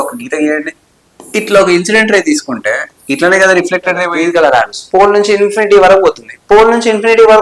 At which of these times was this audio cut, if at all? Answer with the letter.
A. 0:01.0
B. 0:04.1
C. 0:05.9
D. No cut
B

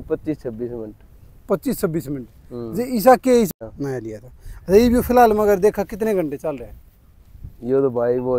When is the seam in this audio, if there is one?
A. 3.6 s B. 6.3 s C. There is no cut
A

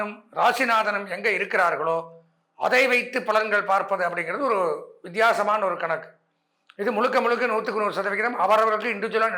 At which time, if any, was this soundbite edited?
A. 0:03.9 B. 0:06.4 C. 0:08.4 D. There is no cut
D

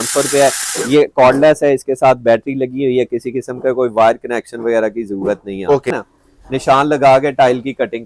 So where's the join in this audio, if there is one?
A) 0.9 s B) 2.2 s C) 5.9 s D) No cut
C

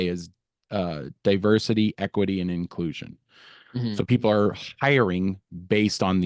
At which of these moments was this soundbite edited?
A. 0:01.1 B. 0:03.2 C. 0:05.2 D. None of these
D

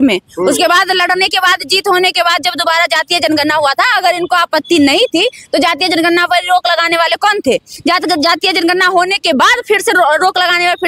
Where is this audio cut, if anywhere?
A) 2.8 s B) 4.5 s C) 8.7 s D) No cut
D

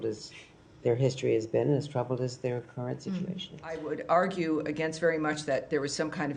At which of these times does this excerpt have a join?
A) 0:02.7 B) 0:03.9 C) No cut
B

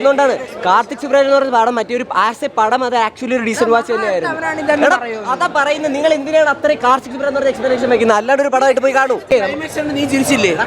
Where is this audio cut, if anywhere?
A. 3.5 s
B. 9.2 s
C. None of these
B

